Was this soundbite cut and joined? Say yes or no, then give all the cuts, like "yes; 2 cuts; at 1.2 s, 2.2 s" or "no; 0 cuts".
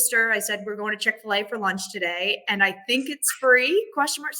no; 0 cuts